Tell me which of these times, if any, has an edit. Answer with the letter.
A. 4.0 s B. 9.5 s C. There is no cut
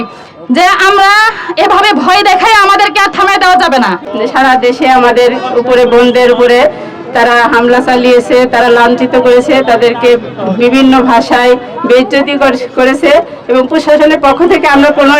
A